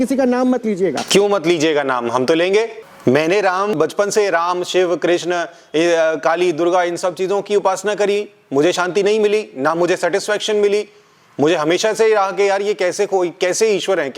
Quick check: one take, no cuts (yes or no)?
no